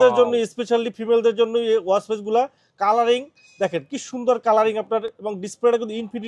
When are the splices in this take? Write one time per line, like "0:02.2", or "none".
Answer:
none